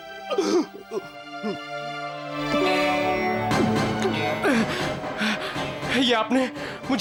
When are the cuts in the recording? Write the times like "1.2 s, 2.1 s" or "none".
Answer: none